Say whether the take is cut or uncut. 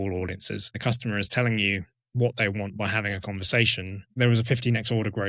cut